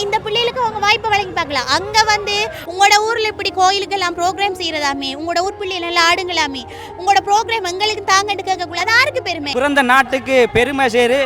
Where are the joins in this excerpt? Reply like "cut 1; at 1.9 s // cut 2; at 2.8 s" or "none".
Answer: cut 1; at 2.6 s // cut 2; at 9.5 s